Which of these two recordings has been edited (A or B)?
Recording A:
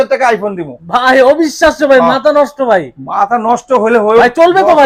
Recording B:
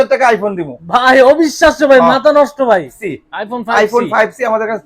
B